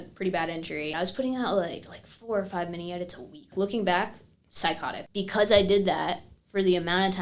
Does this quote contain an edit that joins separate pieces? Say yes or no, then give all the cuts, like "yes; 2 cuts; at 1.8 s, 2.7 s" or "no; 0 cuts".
yes; 3 cuts; at 0.9 s, 3.5 s, 4.9 s